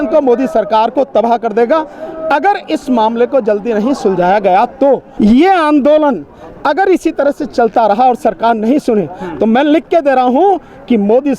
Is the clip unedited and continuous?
no; 1 cut; at 5.1 s

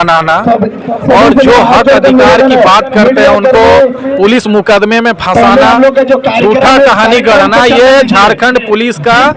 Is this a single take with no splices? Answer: yes; 0 cuts

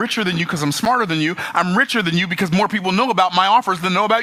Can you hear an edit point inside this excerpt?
no; 0 cuts

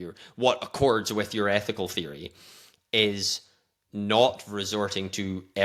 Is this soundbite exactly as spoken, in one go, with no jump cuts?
yes; 0 cuts

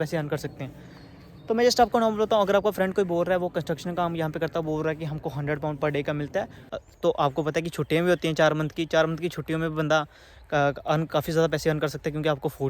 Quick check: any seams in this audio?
yes; 1 cut; at 6.6 s

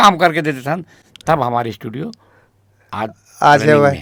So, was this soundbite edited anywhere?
no; 0 cuts

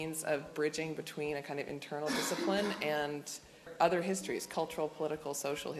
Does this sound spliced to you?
yes; 1 cut; at 3.7 s

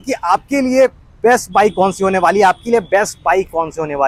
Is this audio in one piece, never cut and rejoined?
yes; 0 cuts

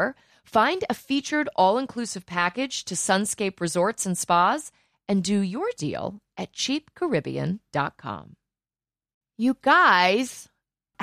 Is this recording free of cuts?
no; 1 cut; at 9.1 s

